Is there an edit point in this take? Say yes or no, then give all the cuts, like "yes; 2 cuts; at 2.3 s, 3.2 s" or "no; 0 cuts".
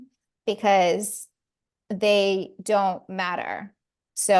no; 0 cuts